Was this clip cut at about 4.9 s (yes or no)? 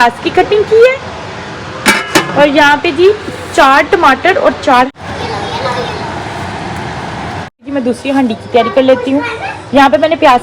yes